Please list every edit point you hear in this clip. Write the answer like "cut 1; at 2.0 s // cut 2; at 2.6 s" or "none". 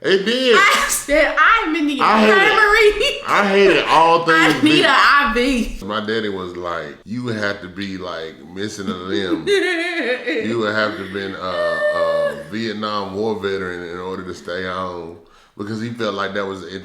cut 1; at 5.9 s // cut 2; at 7.0 s